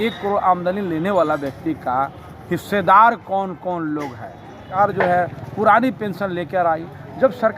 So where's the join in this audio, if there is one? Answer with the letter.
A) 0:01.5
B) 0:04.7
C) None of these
B